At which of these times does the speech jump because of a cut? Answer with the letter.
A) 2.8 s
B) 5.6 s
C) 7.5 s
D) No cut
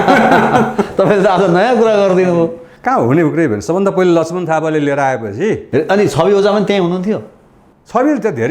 D